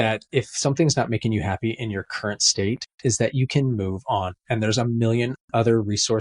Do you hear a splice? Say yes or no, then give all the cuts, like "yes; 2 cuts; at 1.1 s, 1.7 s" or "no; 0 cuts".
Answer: no; 0 cuts